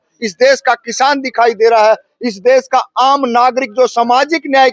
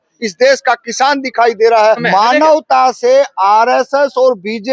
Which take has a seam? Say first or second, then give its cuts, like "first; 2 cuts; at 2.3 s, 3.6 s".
second; 1 cut; at 2.0 s